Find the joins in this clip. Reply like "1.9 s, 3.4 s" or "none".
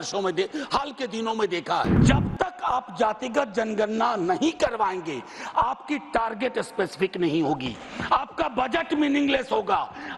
2.0 s